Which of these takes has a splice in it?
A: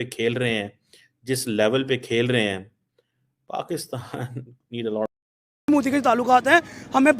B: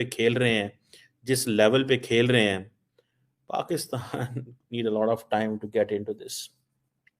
A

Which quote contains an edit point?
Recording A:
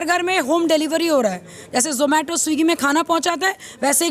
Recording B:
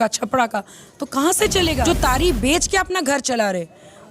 B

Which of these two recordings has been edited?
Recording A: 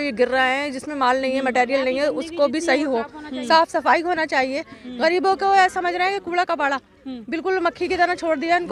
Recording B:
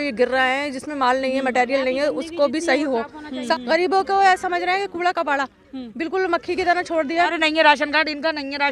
B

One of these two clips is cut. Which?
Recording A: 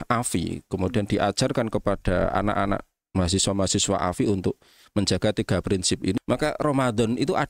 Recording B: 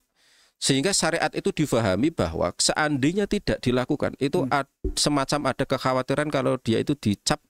A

